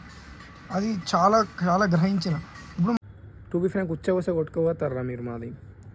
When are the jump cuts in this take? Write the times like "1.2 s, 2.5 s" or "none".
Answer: 3.0 s